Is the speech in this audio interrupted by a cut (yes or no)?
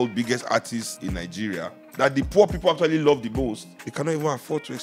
yes